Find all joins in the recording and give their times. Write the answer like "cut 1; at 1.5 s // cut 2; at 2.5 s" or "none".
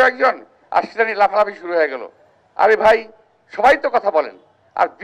none